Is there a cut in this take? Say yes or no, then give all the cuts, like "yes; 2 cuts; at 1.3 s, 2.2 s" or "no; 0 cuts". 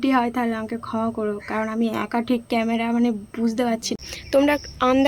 yes; 1 cut; at 4.1 s